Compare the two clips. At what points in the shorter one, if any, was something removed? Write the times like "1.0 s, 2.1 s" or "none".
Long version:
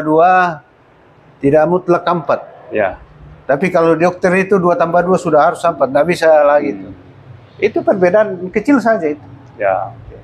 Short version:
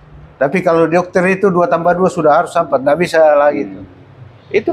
none

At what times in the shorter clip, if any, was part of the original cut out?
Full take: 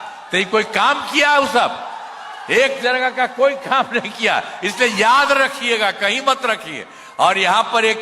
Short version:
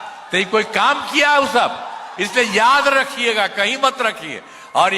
2.1 s

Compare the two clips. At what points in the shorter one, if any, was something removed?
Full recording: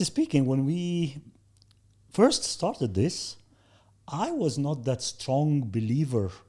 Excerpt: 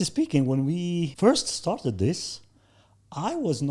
1.1 s

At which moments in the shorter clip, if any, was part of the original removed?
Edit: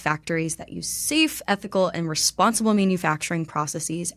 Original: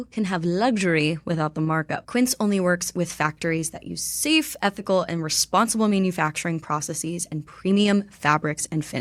none

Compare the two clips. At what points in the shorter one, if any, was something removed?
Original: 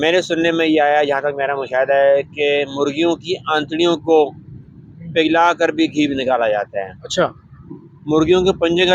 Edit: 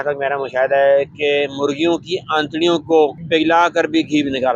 3.2 s

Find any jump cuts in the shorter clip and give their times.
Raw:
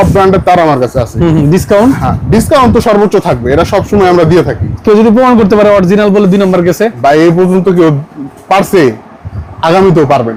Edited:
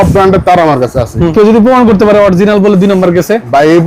1.3 s

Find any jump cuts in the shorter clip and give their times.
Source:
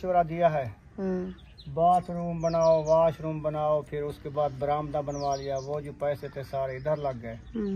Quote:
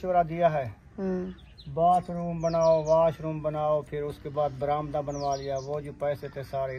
none

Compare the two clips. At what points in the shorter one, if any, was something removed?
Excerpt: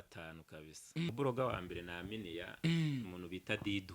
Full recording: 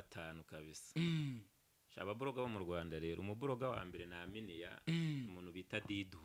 1.1 s

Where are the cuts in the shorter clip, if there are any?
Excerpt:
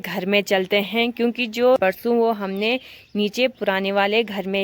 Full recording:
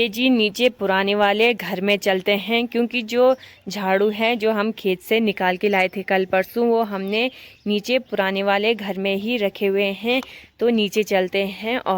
1.8 s

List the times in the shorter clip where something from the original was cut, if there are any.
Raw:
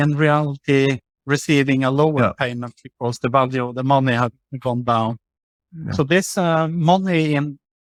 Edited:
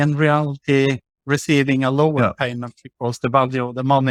none

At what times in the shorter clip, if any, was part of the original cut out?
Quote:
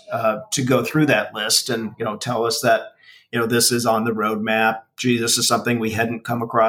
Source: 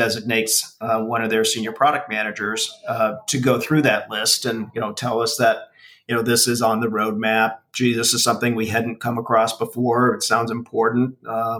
none

